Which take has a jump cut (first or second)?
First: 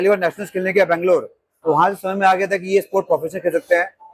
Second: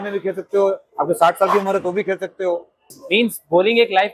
second